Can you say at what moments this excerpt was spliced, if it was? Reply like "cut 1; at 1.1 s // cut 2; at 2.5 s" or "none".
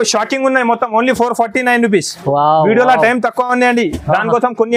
none